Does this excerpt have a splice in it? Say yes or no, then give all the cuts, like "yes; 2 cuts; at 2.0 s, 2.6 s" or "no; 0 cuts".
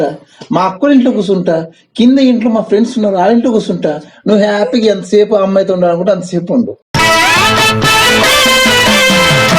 yes; 1 cut; at 6.8 s